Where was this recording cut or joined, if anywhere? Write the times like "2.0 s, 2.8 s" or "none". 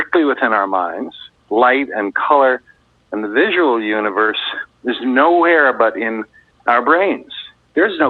1.3 s